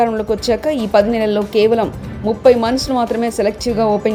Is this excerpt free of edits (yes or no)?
yes